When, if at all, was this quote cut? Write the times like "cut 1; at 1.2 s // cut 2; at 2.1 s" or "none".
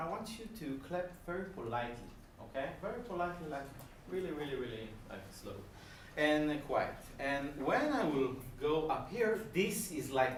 none

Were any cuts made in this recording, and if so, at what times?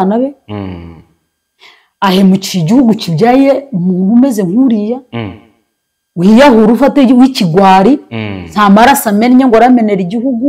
none

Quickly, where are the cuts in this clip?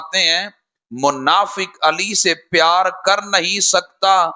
none

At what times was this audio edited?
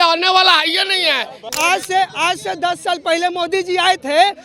cut 1; at 1.4 s

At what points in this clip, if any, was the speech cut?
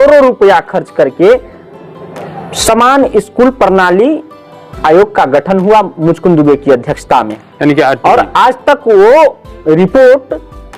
none

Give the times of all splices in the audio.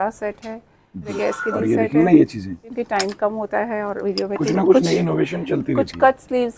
cut 1; at 1.1 s // cut 2; at 2.7 s

